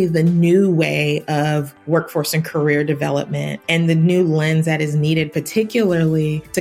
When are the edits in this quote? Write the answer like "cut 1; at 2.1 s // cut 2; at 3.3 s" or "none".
cut 1; at 1.7 s // cut 2; at 3.5 s